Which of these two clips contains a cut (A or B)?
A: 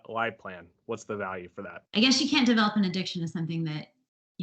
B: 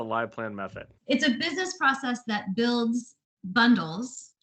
A